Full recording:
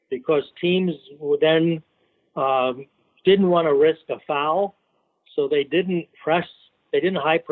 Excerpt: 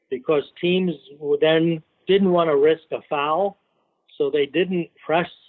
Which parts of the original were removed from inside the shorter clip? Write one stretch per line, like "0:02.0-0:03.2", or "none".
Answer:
0:01.9-0:03.1